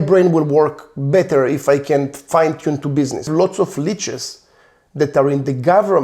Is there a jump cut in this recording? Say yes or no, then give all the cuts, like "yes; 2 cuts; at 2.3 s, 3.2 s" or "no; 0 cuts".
yes; 1 cut; at 3.3 s